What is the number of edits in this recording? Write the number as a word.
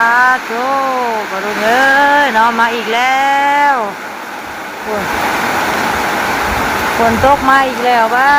zero